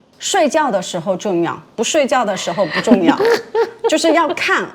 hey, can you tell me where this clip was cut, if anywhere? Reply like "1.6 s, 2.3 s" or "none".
none